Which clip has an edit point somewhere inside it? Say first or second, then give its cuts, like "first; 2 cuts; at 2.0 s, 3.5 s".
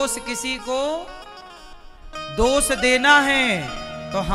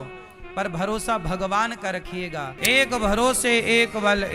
second; 1 cut; at 2.5 s